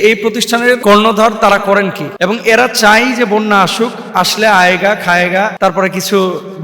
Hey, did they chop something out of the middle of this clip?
yes; 3 cuts; at 0.8 s, 2.0 s, 5.5 s

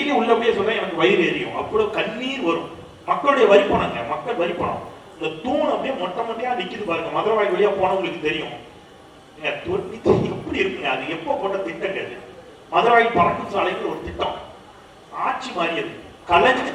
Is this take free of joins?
yes; 0 cuts

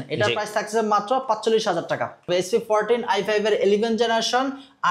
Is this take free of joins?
no; 1 cut; at 2.3 s

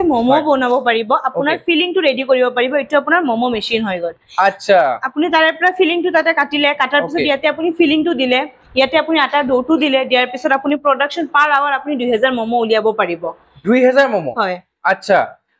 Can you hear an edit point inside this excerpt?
no; 0 cuts

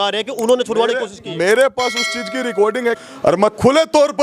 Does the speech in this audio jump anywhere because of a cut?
yes; 1 cut; at 3.0 s

